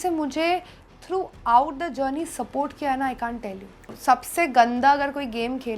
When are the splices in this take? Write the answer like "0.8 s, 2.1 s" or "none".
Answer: 3.9 s